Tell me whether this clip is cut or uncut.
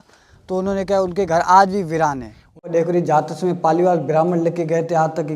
cut